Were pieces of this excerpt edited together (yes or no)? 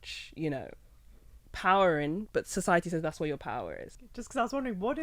yes